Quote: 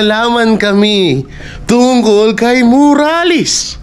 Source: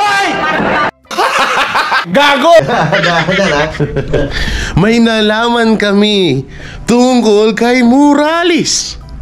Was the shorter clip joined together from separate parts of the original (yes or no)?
no